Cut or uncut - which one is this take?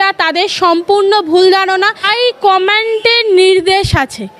cut